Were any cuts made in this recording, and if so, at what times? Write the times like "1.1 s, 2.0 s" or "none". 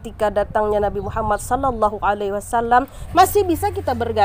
3.0 s

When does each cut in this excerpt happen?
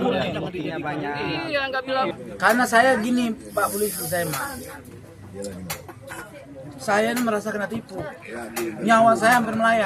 2.2 s

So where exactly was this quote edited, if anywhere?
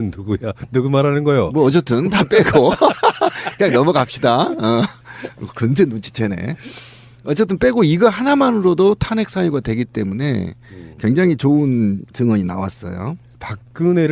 none

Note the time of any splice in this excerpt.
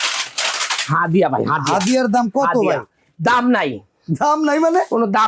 none

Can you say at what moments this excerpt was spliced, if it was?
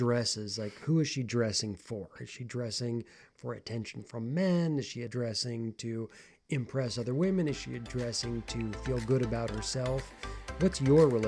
none

